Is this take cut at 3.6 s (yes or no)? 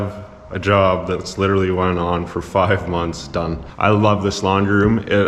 yes